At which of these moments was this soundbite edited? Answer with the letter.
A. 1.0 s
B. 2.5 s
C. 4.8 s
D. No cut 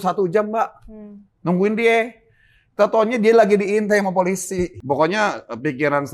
C